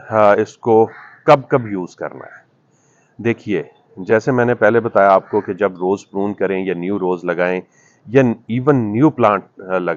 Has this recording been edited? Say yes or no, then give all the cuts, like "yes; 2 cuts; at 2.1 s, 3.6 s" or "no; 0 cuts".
no; 0 cuts